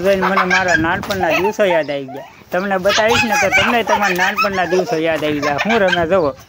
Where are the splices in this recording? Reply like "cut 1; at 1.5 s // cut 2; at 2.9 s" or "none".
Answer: none